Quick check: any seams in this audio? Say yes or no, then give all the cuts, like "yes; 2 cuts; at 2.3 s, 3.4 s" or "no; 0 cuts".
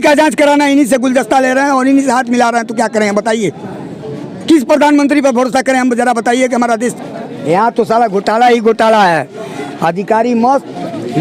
yes; 1 cut; at 6.9 s